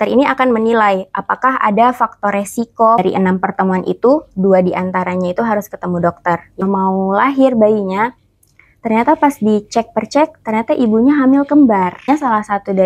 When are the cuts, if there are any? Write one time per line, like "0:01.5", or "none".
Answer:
0:03.0
0:06.6
0:12.0